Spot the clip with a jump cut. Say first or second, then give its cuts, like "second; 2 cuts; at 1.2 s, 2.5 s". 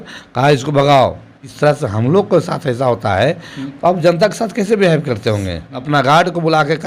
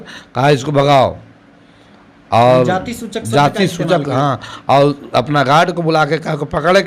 first; 2 cuts; at 1.4 s, 5.9 s